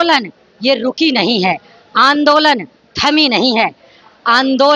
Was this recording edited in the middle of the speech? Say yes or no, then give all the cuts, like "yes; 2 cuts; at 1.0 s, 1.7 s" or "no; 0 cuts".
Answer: no; 0 cuts